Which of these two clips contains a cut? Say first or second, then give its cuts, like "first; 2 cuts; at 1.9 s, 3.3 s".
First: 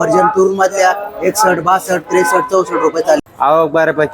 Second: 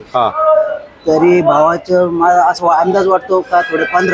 first; 1 cut; at 3.2 s